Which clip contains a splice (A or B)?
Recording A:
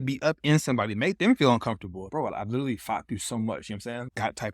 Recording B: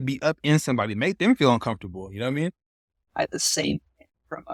A